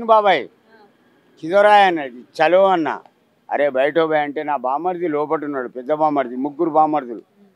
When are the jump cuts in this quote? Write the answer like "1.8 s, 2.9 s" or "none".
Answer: none